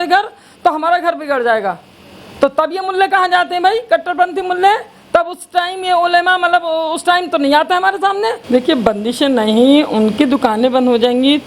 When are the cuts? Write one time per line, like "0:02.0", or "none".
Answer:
0:08.4